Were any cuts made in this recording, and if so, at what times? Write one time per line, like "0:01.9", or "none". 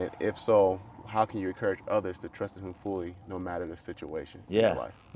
none